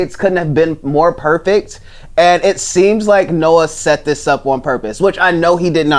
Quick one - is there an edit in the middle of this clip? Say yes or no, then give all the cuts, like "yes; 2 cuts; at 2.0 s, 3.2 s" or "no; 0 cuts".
no; 0 cuts